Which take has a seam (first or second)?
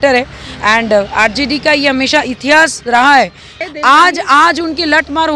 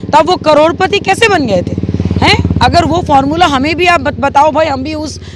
first